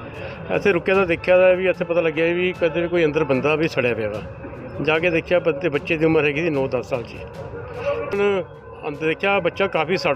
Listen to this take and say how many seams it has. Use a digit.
1